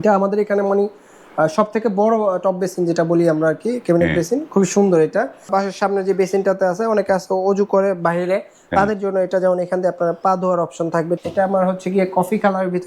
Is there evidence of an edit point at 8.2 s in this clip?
no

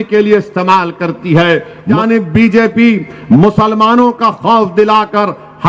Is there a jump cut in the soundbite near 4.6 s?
no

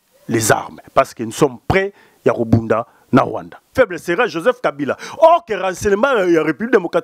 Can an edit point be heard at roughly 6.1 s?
no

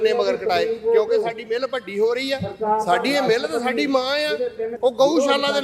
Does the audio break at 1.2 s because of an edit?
no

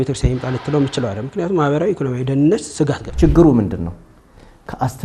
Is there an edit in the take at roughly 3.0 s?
yes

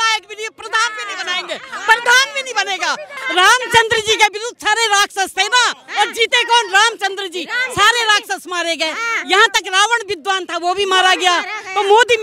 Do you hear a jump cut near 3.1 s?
yes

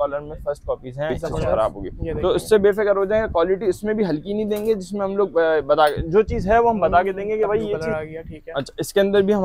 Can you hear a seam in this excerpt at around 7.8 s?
yes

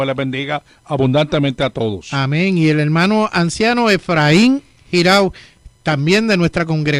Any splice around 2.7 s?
yes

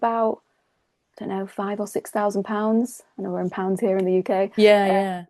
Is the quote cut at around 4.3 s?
no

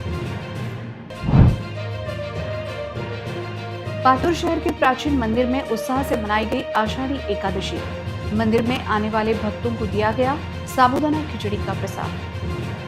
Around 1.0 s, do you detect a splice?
yes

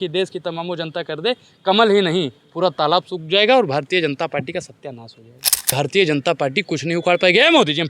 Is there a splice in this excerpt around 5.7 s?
yes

